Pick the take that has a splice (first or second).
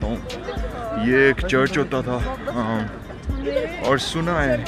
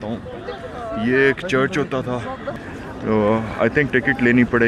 second